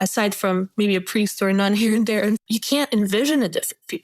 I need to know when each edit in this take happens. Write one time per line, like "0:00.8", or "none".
0:02.4